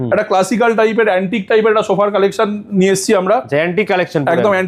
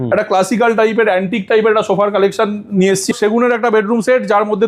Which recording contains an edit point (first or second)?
second